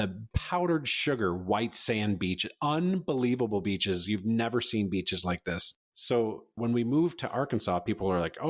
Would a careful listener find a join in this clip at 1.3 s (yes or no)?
no